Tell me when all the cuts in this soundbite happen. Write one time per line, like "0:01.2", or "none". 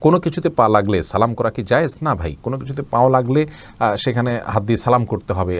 none

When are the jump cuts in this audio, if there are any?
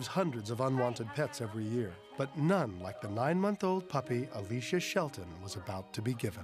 none

